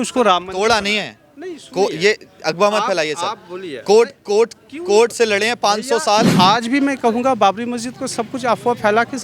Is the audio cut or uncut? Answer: cut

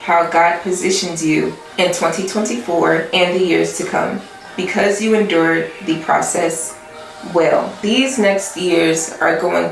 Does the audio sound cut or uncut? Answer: cut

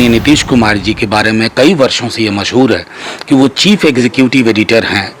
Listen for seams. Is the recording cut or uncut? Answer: uncut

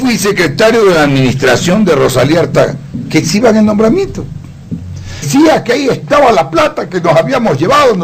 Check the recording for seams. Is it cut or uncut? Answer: uncut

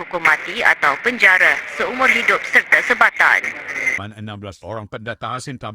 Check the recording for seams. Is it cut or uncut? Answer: cut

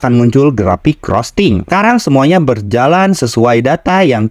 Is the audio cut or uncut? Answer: cut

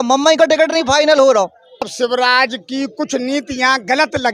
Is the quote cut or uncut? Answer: cut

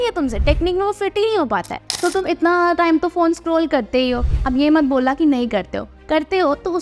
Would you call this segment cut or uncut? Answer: cut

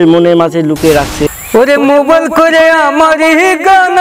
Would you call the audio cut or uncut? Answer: cut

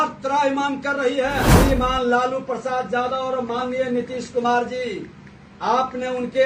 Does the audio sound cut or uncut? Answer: cut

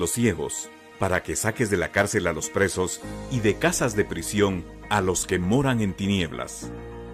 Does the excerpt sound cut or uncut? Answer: uncut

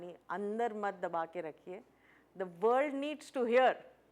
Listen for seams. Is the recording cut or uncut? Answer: uncut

